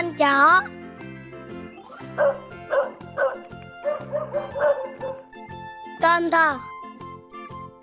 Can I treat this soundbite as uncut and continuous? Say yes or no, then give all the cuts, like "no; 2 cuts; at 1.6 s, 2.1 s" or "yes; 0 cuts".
yes; 0 cuts